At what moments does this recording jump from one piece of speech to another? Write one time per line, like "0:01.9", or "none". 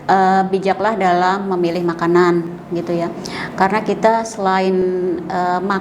none